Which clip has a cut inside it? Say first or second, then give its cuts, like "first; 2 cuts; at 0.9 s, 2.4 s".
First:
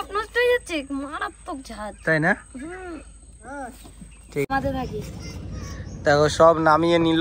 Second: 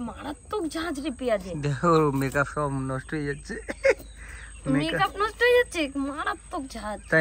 first; 1 cut; at 4.5 s